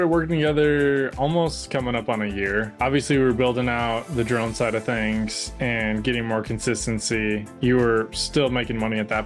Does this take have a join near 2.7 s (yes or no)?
yes